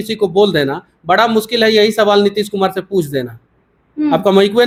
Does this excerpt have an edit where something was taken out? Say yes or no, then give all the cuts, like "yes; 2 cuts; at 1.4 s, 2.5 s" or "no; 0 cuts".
no; 0 cuts